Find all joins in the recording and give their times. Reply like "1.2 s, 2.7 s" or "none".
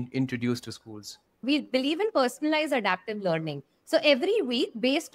1.4 s